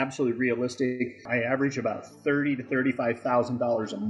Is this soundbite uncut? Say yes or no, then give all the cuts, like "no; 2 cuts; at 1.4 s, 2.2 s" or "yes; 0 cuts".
no; 1 cut; at 1.3 s